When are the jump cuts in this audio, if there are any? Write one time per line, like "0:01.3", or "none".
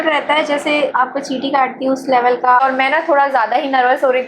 0:00.9
0:02.6